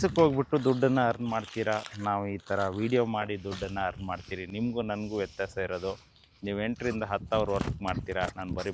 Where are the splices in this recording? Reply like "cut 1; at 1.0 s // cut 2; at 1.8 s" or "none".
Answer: none